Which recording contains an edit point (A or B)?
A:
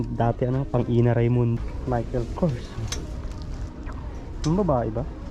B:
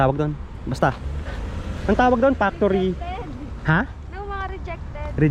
A